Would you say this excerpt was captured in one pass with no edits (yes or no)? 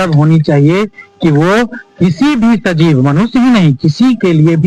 yes